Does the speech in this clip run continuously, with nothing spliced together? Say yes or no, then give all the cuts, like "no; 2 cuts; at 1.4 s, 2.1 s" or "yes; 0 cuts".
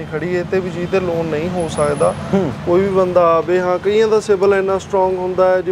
yes; 0 cuts